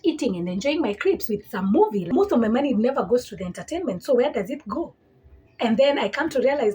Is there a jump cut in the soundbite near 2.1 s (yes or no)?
yes